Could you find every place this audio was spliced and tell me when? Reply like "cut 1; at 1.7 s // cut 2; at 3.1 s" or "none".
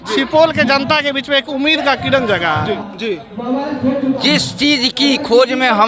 cut 1; at 2.8 s